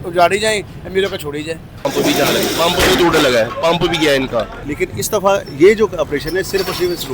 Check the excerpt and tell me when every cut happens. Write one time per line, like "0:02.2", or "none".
0:01.9
0:04.6

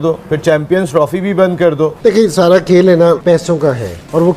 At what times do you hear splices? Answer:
0:02.0

